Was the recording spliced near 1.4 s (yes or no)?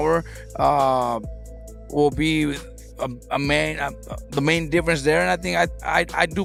no